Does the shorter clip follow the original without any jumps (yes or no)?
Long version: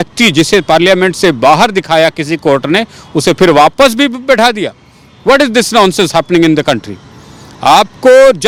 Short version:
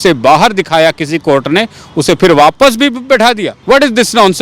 no